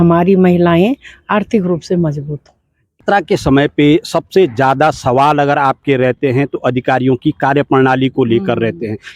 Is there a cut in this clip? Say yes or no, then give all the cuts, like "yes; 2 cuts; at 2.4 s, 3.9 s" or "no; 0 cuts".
yes; 1 cut; at 3.0 s